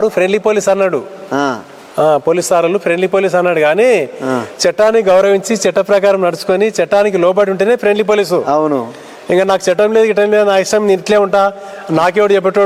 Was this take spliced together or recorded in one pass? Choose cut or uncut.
uncut